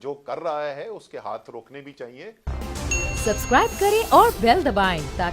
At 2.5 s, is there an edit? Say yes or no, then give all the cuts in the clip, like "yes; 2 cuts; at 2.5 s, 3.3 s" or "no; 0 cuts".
yes; 1 cut; at 2.5 s